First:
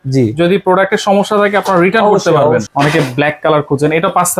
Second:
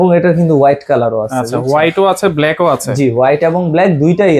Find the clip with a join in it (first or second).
first